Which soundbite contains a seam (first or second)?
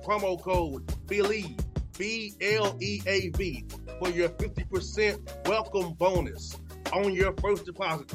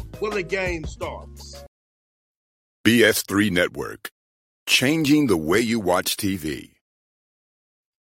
second